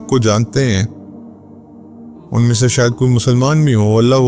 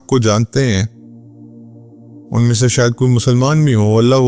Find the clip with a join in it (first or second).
second